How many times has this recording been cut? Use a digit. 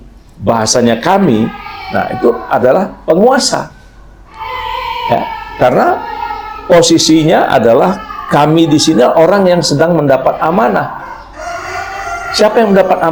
0